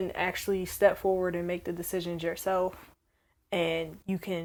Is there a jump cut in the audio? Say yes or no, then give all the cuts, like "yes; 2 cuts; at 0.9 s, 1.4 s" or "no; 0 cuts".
no; 0 cuts